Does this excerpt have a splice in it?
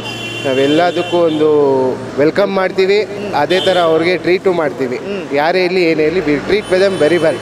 yes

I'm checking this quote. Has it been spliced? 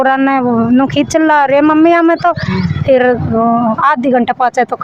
no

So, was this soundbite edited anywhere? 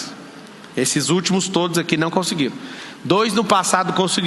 no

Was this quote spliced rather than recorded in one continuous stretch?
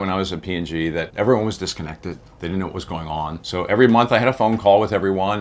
yes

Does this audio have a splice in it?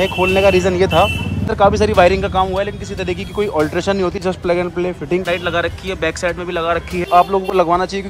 yes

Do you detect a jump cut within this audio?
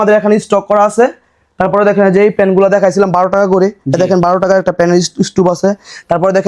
no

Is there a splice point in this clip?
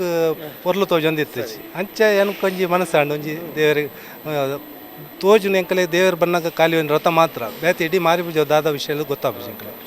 no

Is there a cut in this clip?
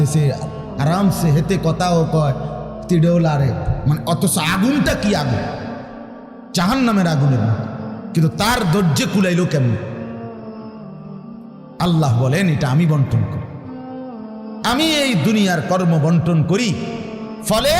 yes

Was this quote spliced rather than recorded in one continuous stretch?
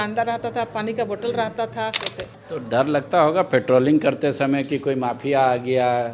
yes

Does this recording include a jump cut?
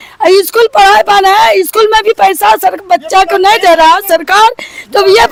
no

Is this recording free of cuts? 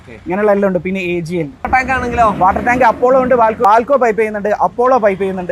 no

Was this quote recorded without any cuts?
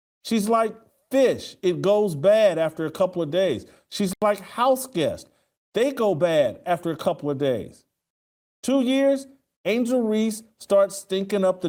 yes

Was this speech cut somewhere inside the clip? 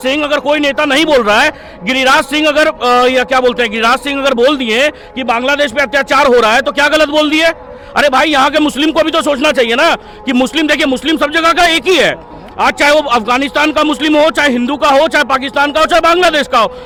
no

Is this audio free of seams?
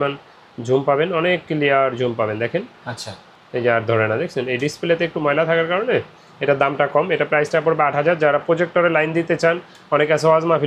yes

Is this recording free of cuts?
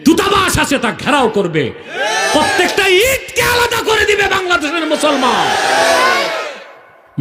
yes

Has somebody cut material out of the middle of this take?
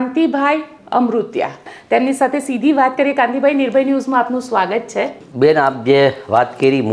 yes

